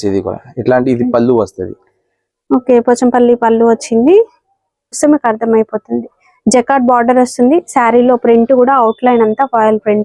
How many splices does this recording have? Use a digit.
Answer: 1